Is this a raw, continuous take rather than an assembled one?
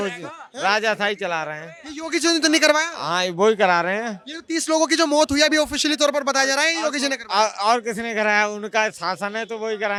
yes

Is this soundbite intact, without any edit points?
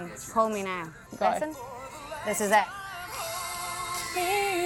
no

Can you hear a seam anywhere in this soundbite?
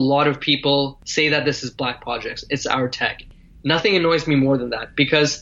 yes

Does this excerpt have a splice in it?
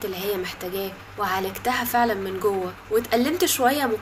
yes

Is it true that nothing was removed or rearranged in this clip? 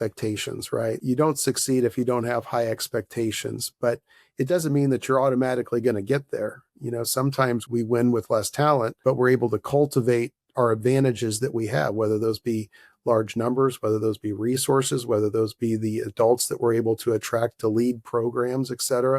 no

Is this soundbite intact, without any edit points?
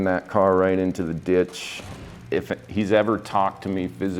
no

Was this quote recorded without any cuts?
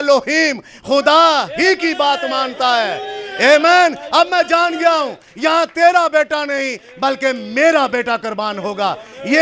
yes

